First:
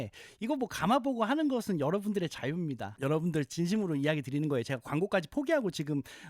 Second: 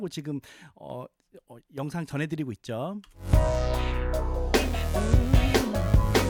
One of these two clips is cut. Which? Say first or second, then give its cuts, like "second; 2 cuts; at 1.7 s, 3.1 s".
first; 1 cut; at 2.8 s